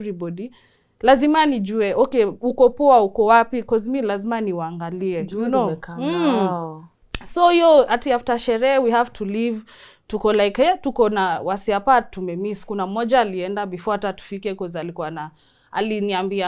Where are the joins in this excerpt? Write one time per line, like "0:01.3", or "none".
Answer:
none